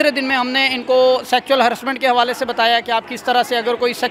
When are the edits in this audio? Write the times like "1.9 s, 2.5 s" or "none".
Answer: none